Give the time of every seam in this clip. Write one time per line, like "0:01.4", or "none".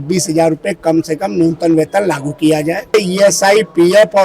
0:02.9